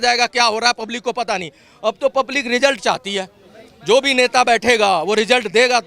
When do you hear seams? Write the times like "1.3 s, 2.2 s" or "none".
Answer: none